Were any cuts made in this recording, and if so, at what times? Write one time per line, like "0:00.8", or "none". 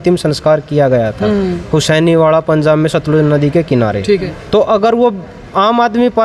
0:04.4